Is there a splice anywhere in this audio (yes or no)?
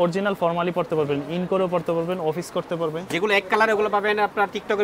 no